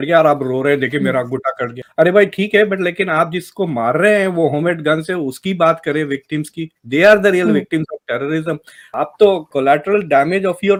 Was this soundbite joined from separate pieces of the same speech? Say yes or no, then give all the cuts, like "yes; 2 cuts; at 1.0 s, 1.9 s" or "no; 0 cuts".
no; 0 cuts